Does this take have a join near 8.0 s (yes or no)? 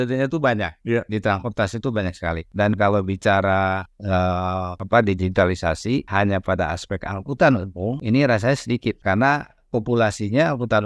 yes